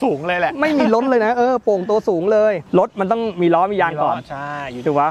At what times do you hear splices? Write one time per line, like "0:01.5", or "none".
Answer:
0:02.6